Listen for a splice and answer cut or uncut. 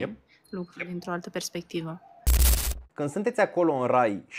cut